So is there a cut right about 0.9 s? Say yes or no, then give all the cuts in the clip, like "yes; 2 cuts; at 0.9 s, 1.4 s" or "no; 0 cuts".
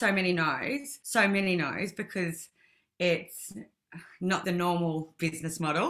yes; 2 cuts; at 0.9 s, 4.4 s